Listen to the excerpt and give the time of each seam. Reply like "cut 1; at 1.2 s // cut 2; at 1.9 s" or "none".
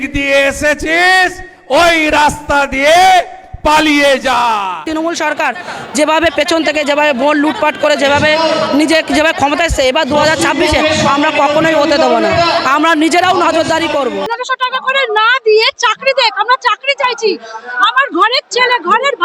cut 1; at 4.8 s // cut 2; at 14.3 s